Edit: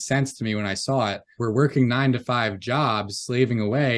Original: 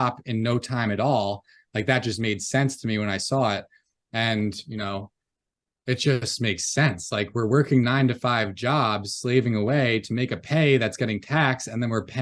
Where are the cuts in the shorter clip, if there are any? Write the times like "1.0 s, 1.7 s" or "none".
1.3 s